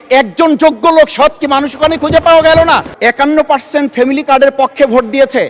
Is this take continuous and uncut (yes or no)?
no